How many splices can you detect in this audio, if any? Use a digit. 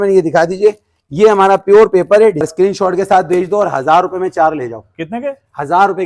1